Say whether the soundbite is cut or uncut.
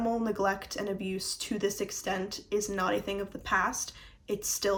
uncut